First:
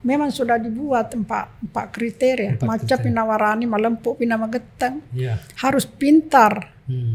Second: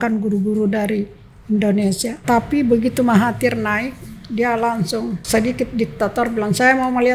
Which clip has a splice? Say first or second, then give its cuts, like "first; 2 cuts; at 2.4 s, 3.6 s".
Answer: second; 2 cuts; at 2.2 s, 5.2 s